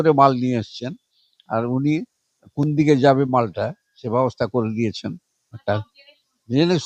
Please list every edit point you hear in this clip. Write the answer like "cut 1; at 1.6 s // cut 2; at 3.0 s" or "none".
none